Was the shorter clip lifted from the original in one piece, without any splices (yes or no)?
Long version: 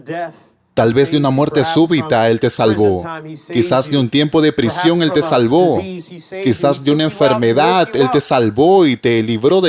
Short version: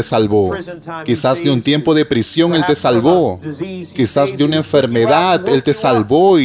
yes